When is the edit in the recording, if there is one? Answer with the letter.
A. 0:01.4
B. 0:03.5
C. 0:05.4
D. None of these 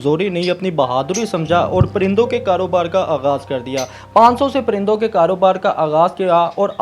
D